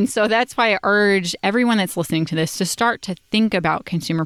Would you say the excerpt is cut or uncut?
uncut